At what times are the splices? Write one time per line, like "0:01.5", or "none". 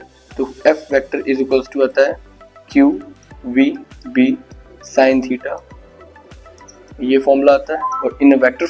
none